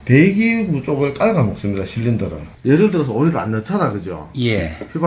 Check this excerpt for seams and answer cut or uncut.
cut